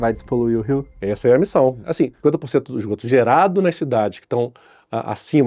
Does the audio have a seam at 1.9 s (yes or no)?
yes